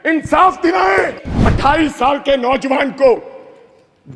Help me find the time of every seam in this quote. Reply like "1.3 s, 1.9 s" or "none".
1.5 s